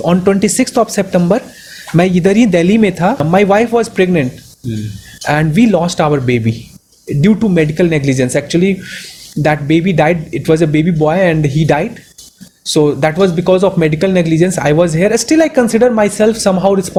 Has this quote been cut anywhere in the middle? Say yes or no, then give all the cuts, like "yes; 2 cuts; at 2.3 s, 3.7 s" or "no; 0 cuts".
no; 0 cuts